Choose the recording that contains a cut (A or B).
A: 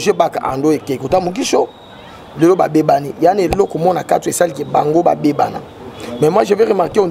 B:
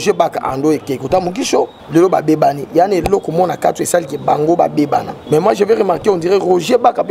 B